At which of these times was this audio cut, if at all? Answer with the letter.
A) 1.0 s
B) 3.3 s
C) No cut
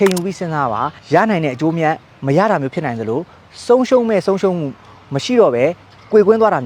A